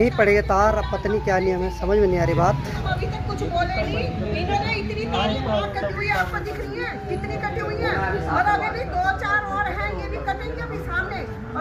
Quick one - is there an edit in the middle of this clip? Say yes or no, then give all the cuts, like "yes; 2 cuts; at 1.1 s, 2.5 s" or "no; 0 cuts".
no; 0 cuts